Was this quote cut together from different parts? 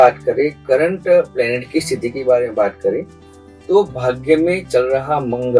no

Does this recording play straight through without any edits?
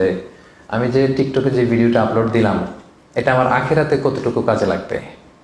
yes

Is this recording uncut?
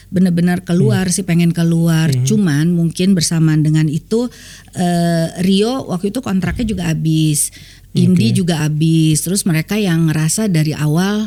yes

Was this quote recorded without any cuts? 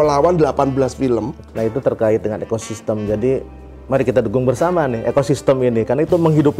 no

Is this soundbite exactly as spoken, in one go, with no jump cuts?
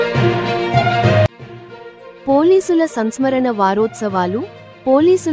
no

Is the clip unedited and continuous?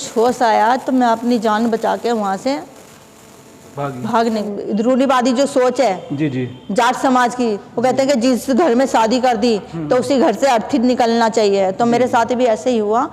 no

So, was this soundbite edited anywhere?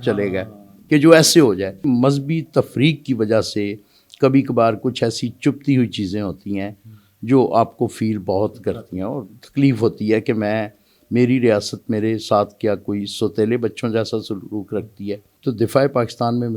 yes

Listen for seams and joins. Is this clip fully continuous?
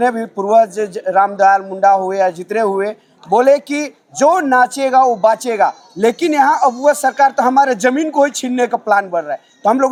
yes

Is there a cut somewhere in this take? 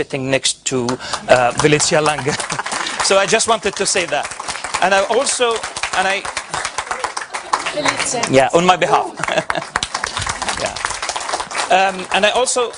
yes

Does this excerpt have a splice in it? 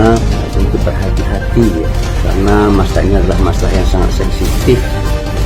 no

